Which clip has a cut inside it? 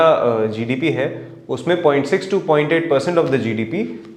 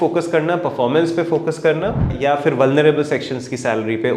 second; 1 cut; at 2.1 s

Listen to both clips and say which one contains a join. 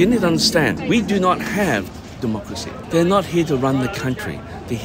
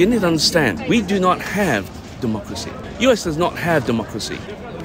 first; 1 cut; at 2.7 s

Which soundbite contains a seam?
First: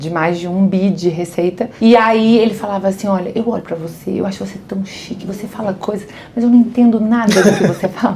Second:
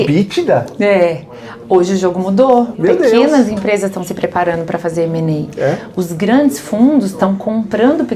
first; 1 cut; at 1.7 s

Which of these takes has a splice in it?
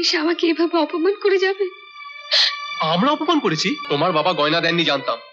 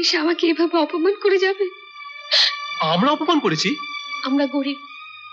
first; 1 cut; at 3.8 s

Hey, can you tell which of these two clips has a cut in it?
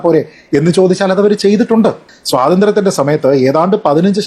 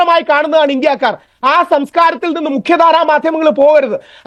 first; 1 cut; at 2.0 s

